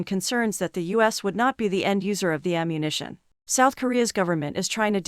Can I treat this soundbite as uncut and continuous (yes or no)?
no